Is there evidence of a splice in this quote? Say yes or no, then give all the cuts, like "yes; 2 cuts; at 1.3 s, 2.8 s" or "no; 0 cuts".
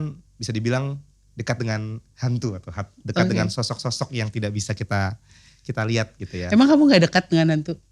no; 0 cuts